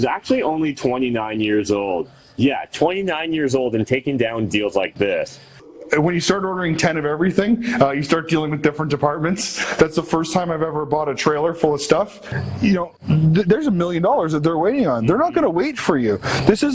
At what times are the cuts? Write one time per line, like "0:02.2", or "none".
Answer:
0:05.7
0:09.6
0:12.2